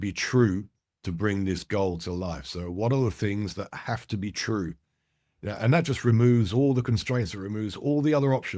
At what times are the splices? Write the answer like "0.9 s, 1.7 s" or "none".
none